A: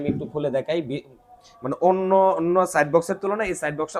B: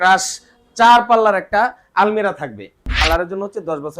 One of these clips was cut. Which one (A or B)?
B